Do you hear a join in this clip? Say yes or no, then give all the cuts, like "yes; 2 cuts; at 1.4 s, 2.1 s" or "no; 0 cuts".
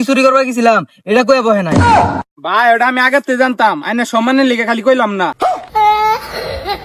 no; 0 cuts